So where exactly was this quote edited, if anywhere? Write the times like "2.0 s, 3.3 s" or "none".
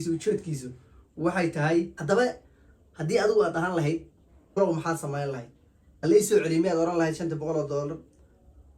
2.0 s, 4.6 s